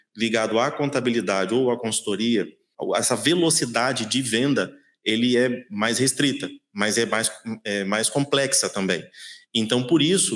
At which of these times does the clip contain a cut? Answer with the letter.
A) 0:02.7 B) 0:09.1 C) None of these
A